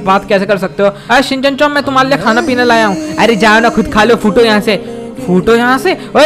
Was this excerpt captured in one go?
no; 1 cut; at 1.0 s

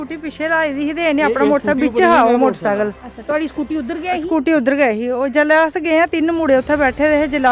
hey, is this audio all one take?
yes; 0 cuts

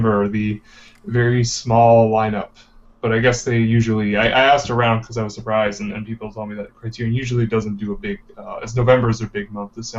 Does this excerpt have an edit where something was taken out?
no; 0 cuts

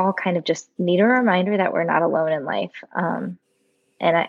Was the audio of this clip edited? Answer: no; 0 cuts

